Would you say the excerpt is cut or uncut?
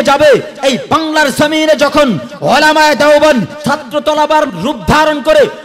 cut